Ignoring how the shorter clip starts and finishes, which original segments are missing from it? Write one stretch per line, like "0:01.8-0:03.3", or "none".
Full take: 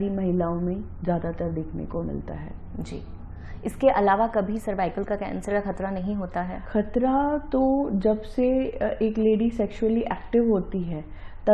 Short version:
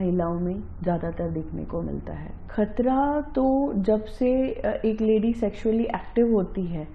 0:02.6-0:06.6